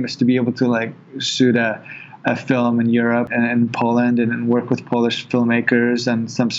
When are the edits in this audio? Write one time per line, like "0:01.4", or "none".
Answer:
0:03.3